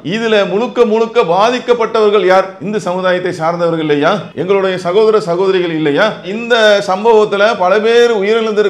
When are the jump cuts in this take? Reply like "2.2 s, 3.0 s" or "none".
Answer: 4.3 s

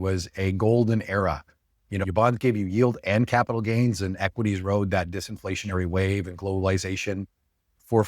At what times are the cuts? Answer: 2.0 s

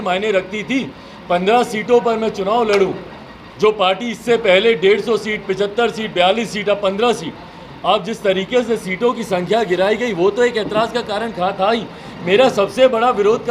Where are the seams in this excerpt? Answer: none

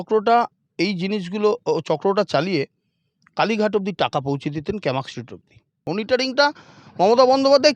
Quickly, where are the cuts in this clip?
5.7 s

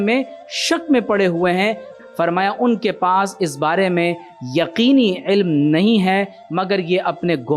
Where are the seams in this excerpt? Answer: 2.0 s, 6.4 s

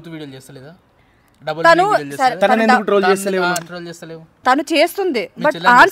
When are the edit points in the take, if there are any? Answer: 4.3 s

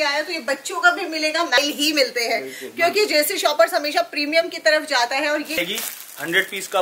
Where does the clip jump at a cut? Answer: 1.6 s, 5.6 s

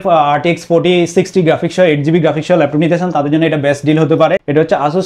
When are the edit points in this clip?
none

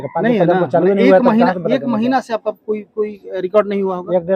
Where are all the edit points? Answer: none

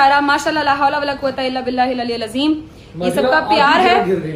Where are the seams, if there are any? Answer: none

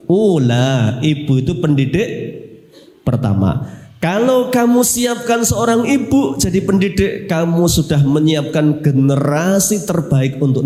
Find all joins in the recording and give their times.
none

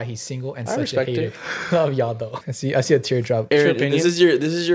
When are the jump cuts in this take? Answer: 2.3 s, 3.4 s

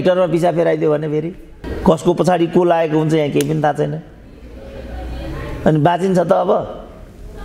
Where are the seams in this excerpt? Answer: none

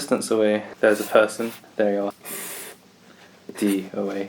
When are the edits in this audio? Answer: 2.1 s

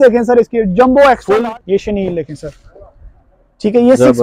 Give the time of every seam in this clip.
1.4 s

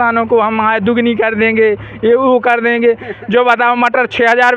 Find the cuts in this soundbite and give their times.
none

